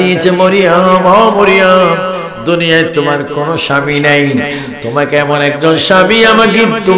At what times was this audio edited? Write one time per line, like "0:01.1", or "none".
none

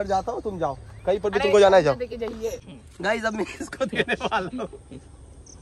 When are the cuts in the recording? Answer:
0:02.5

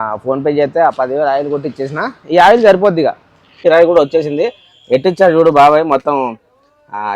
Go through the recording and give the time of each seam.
0:03.6

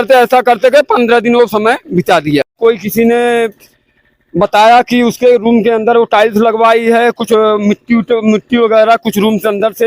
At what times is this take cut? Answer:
0:02.5

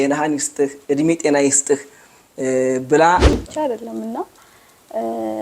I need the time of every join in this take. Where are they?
0:03.3

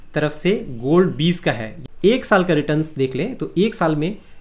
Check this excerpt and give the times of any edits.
0:01.7

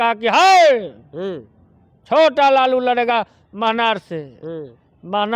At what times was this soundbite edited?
none

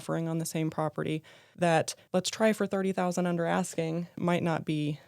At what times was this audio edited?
0:01.4
0:02.0
0:04.1

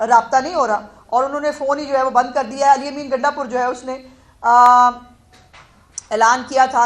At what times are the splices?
none

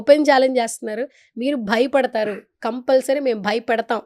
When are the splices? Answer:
none

